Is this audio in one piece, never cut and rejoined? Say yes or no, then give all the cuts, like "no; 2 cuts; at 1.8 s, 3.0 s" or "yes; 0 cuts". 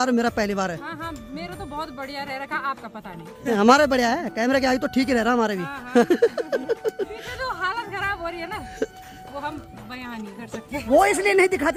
yes; 0 cuts